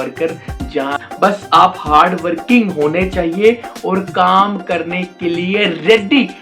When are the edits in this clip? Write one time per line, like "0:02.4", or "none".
0:01.0